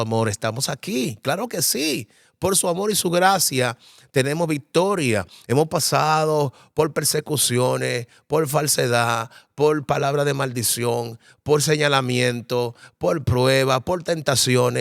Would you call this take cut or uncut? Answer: uncut